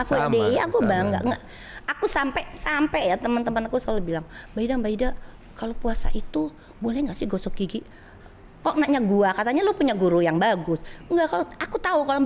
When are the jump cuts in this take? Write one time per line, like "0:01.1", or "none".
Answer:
none